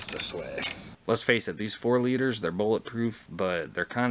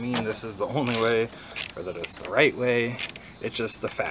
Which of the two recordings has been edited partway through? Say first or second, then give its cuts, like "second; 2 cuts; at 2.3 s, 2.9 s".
first; 1 cut; at 1.0 s